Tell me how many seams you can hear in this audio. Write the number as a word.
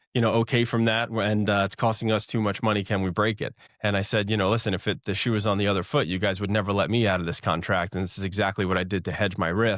zero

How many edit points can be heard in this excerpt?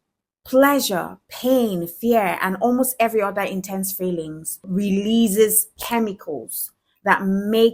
one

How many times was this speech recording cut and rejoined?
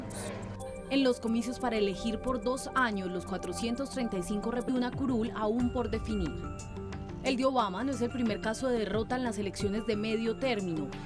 zero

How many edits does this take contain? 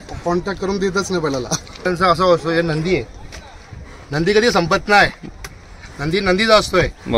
one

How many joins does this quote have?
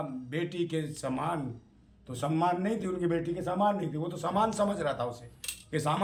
zero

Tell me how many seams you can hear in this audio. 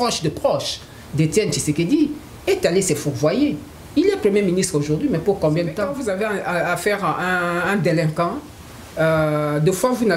one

